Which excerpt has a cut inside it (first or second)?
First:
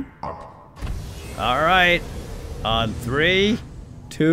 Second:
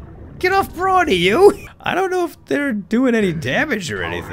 second